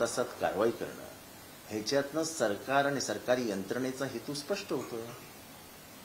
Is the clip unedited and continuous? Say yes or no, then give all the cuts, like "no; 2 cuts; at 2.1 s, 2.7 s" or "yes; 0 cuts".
yes; 0 cuts